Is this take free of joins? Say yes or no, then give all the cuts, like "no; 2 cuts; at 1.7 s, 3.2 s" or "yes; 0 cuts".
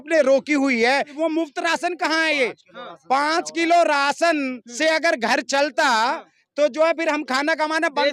no; 1 cut; at 1.1 s